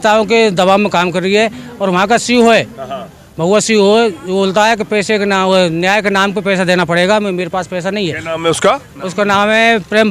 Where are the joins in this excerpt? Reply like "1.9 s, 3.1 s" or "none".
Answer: none